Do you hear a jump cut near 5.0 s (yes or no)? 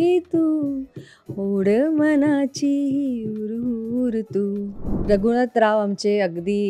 yes